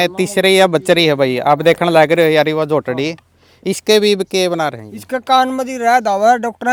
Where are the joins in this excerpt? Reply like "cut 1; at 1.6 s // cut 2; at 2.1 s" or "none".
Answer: none